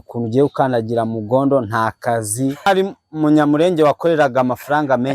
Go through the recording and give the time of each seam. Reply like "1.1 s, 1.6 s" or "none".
2.7 s